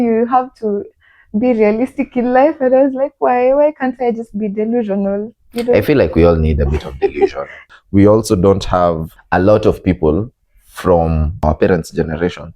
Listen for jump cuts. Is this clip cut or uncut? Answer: cut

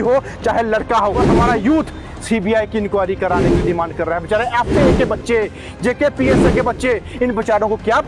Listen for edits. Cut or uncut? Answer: cut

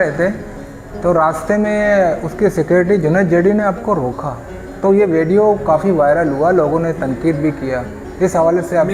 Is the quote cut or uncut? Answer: uncut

